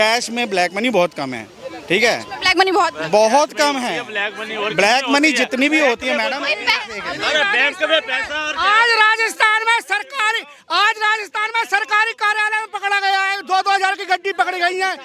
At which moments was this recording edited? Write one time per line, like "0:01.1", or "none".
none